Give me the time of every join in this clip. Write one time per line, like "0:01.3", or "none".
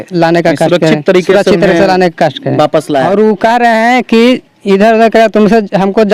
0:03.1